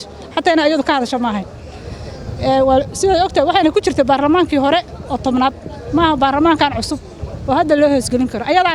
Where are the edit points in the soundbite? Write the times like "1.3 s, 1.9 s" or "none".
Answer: none